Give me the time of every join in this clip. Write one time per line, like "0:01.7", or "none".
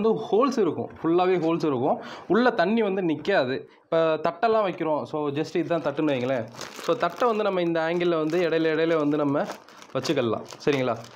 none